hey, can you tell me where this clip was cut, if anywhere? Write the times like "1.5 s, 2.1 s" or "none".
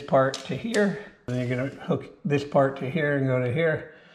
1.3 s